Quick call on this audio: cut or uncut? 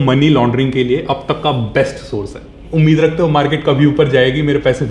cut